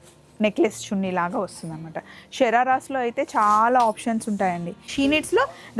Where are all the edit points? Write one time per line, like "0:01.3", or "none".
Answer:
0:04.8